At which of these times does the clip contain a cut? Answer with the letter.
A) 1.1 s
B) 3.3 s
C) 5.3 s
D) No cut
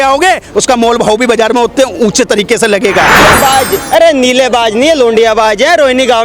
B